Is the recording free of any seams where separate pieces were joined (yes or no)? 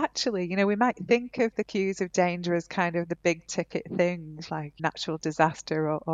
no